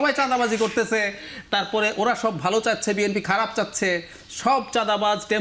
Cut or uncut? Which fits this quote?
uncut